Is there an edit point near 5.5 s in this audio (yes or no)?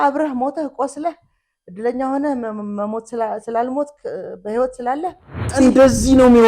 yes